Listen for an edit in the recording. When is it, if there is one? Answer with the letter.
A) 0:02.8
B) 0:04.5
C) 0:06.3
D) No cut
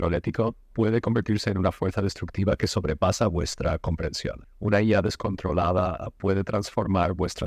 B